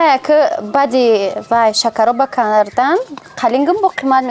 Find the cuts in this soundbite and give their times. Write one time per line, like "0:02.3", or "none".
none